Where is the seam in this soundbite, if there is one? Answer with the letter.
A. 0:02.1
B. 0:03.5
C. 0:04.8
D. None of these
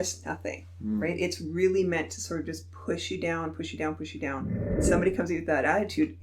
C